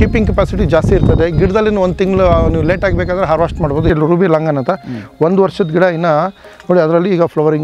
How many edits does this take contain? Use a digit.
1